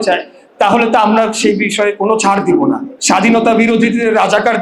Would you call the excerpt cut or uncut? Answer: cut